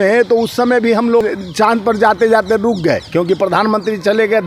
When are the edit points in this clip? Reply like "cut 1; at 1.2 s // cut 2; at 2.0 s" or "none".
cut 1; at 1.2 s